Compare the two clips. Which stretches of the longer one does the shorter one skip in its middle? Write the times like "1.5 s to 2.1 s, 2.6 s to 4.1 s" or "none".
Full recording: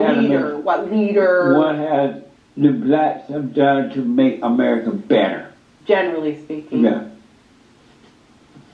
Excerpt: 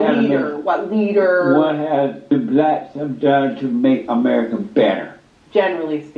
2.3 s to 2.7 s